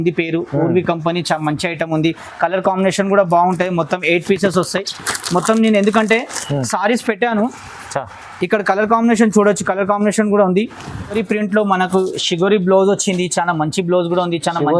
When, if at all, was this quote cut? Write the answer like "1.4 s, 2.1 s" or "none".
11.1 s